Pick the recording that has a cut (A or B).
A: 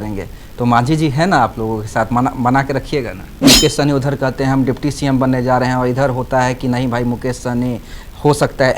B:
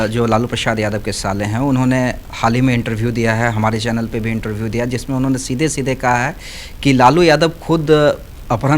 A